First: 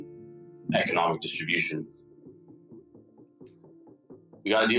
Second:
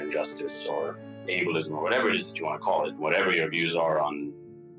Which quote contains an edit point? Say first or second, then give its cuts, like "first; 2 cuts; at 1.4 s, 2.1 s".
second; 1 cut; at 2.9 s